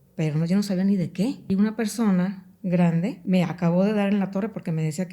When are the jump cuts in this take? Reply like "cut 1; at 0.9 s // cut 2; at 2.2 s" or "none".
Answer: cut 1; at 1.5 s // cut 2; at 3.2 s